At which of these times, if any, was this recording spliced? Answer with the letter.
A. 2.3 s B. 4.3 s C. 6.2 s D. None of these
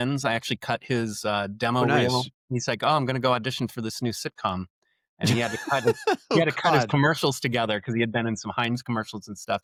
D